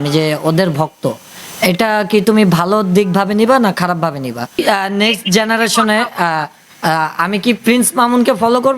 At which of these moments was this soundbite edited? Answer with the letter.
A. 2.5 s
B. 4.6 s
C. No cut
B